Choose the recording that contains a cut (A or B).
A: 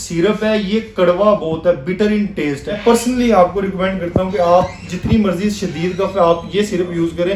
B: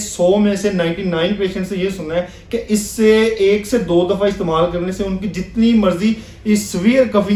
A